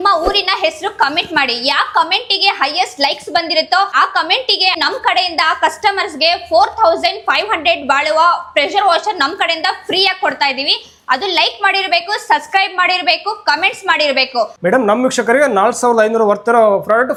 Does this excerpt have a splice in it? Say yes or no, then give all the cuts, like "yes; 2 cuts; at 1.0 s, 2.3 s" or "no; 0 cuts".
no; 0 cuts